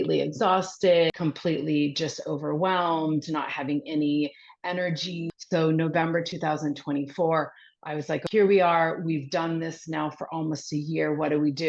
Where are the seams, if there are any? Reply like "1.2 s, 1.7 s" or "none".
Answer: 1.1 s, 5.2 s, 8.2 s